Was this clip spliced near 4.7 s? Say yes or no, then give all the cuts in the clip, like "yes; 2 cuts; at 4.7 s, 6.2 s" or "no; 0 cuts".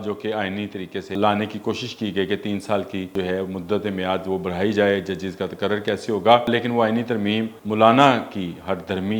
no; 4 cuts; at 1.1 s, 3.1 s, 6.5 s, 7.6 s